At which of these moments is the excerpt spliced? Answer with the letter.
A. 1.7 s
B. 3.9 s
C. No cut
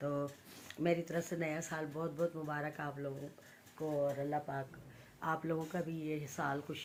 C